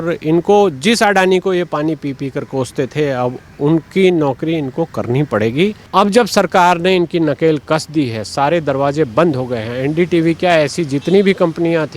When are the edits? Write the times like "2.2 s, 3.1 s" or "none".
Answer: 5.9 s